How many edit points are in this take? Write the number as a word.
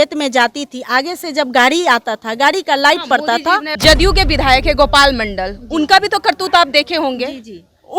one